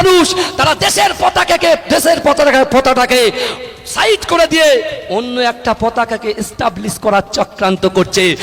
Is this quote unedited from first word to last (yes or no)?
yes